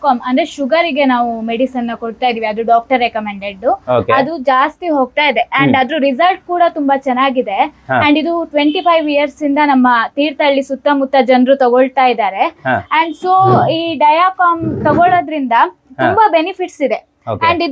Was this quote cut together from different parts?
no; 0 cuts

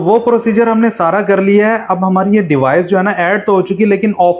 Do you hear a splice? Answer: no; 0 cuts

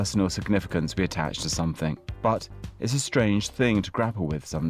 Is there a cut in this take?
yes; 1 cut; at 2.1 s

